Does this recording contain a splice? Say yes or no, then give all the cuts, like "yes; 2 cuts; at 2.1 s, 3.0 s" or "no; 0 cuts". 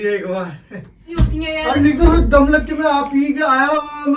yes; 1 cut; at 1.1 s